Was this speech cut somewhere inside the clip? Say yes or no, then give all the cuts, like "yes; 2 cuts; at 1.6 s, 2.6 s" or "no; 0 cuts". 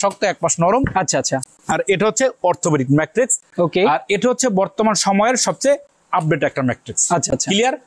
no; 0 cuts